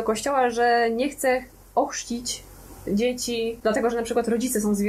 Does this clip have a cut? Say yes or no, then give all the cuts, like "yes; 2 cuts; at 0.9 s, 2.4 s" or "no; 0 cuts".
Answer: yes; 1 cut; at 3.6 s